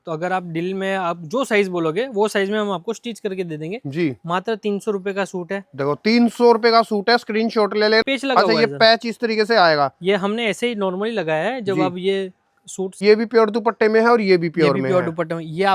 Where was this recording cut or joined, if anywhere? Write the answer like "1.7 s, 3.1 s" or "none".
8.0 s, 13.0 s

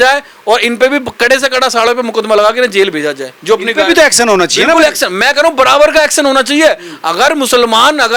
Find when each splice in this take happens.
none

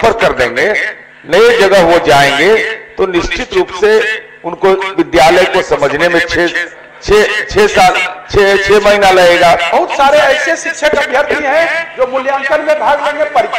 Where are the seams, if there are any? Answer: 9.7 s

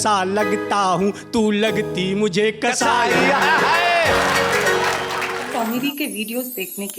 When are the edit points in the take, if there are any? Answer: 5.4 s

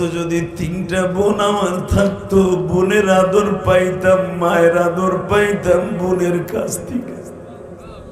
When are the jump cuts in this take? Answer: none

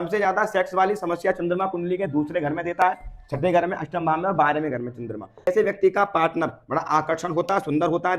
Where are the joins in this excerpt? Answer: 5.5 s

